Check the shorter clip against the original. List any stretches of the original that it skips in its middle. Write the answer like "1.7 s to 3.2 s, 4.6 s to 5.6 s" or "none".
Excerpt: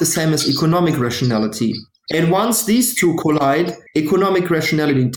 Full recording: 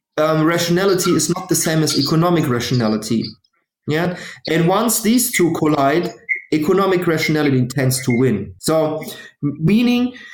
3.4 s to 4.3 s, 6.2 s to 6.4 s